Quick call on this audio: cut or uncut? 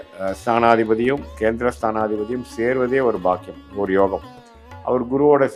uncut